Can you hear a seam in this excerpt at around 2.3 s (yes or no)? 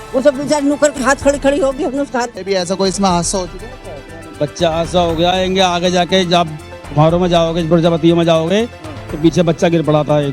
yes